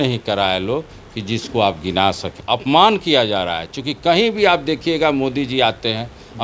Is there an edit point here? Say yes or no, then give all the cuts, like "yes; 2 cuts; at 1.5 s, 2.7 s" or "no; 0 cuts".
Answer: yes; 1 cut; at 2.3 s